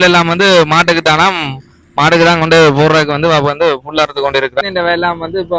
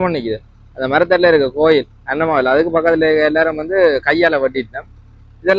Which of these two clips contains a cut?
first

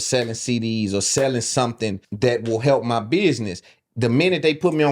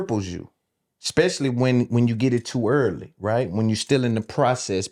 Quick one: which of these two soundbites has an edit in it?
first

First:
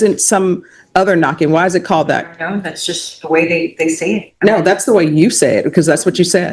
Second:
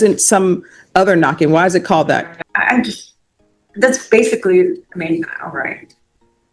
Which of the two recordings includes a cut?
second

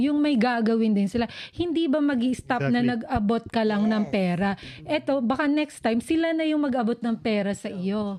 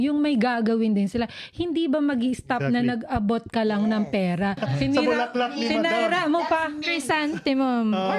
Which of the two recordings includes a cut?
second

